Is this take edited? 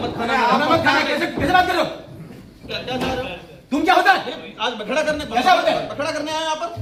no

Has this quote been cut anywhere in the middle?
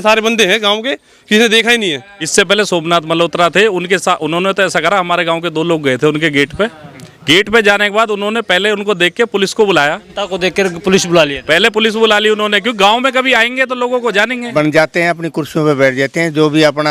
yes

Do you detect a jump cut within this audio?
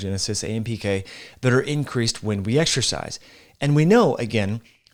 no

